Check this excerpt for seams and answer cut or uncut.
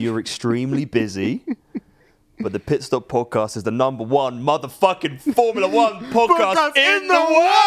uncut